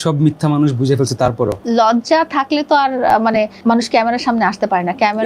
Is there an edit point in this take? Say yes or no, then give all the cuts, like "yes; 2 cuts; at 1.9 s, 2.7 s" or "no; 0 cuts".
yes; 2 cuts; at 1.6 s, 3.5 s